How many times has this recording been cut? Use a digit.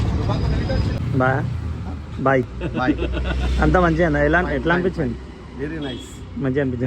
1